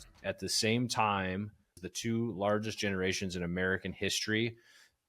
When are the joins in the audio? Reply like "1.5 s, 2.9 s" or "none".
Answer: 1.7 s